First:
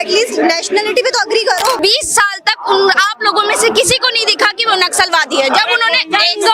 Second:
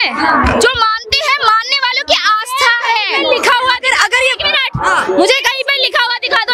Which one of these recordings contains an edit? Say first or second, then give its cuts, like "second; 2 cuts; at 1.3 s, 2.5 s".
first; 1 cut; at 1.8 s